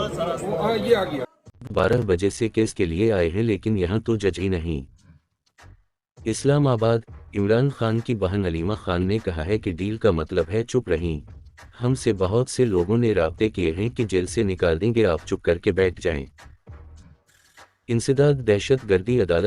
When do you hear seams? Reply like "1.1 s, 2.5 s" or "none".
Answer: 1.1 s